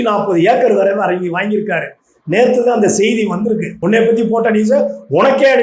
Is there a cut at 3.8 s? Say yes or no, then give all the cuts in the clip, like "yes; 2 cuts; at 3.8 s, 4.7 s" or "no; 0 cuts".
yes; 1 cut; at 3.8 s